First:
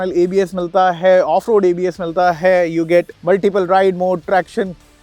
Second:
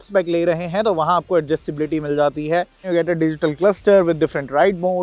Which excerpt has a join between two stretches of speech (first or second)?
second